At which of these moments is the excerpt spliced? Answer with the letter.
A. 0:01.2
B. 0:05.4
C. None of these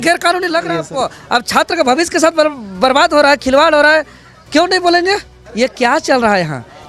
B